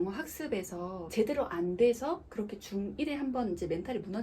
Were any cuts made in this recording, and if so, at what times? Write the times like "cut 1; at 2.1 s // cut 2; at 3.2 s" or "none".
cut 1; at 1.0 s